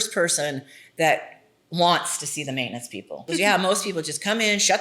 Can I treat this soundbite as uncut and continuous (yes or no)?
no